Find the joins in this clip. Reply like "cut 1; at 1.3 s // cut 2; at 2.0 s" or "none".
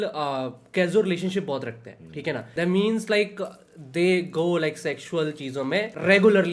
none

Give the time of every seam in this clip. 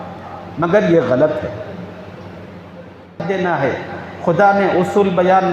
cut 1; at 3.2 s

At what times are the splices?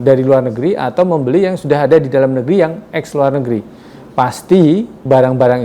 none

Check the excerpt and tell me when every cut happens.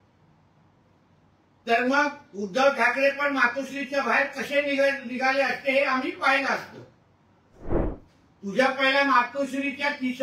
cut 1; at 7.9 s

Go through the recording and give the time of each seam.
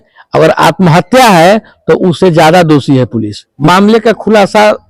cut 1; at 3.4 s

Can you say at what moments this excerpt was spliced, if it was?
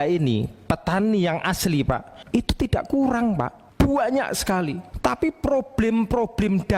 cut 1; at 2.1 s // cut 2; at 3.6 s // cut 3; at 4.8 s

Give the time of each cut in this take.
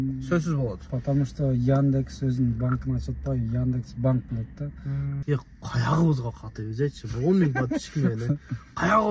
cut 1; at 5.2 s

